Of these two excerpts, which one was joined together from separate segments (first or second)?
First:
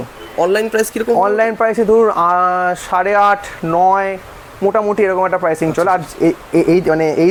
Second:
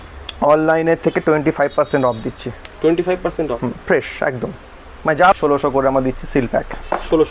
second